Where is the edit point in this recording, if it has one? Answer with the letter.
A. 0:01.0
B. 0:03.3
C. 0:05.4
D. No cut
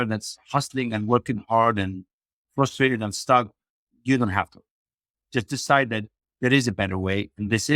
D